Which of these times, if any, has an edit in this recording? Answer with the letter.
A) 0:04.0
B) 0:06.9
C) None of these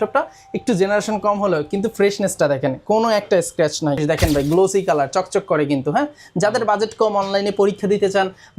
A